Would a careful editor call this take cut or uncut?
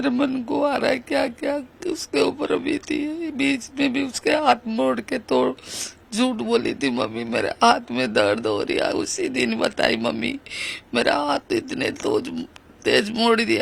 uncut